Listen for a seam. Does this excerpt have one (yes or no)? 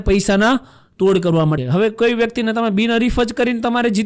yes